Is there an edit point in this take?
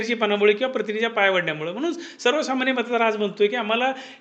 no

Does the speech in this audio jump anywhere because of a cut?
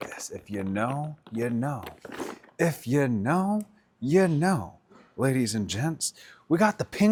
no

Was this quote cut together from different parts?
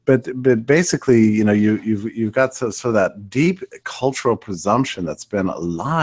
no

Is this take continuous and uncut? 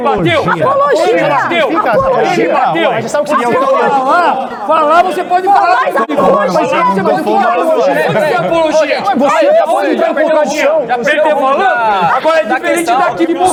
yes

